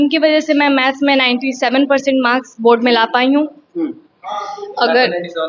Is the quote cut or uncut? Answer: uncut